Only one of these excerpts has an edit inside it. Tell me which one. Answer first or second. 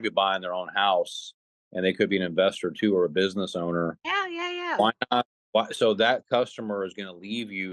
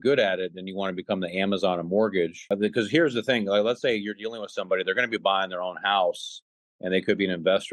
second